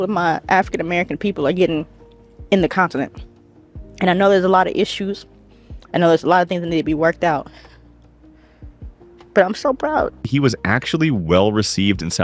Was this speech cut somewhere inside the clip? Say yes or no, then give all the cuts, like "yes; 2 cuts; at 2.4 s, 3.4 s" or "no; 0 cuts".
yes; 1 cut; at 10.3 s